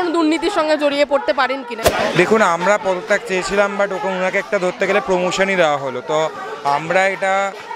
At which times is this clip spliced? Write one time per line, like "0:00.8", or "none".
0:01.8